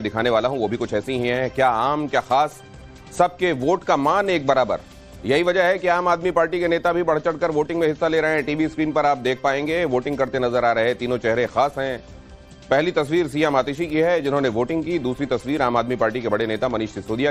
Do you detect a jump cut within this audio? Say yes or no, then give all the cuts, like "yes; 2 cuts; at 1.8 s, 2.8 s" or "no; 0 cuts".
yes; 1 cut; at 6.1 s